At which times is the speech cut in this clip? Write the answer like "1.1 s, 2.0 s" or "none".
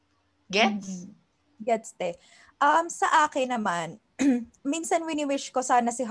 4.5 s